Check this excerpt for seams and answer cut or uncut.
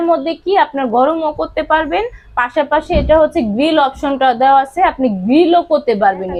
uncut